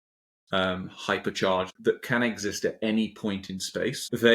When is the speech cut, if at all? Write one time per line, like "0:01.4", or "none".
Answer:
0:01.7

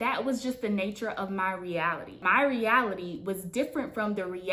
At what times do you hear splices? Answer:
0:02.2

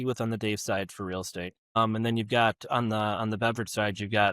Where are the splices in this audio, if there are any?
0:01.8

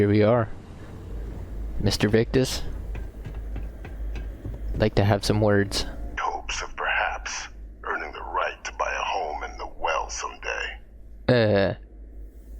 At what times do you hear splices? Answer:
0:06.1

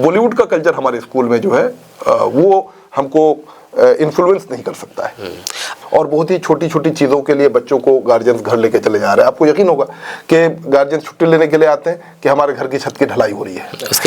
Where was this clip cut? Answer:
0:05.7

